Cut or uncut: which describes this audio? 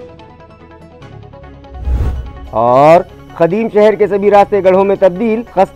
uncut